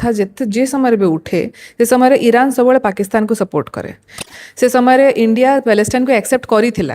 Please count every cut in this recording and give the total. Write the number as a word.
one